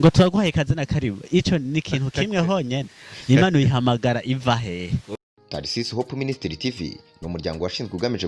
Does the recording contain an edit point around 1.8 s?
no; 1 cut; at 5.1 s

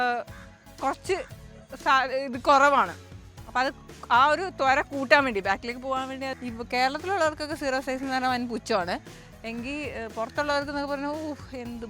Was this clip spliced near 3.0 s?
no; 1 cut; at 6.3 s

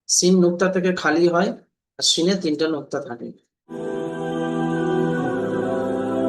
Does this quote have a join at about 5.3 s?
no; 1 cut; at 3.7 s

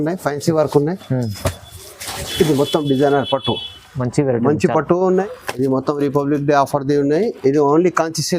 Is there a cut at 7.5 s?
no; 1 cut; at 5.2 s

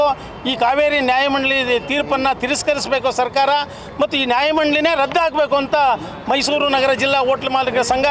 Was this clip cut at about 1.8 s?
no; 0 cuts

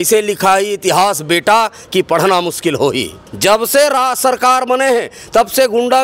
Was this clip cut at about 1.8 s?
no; 1 cut; at 3.2 s

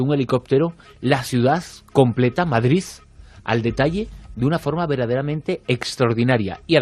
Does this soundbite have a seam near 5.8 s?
yes; 1 cut; at 5.8 s

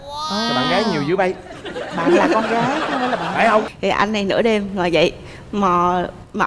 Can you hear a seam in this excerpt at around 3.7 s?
yes; 1 cut; at 3.7 s

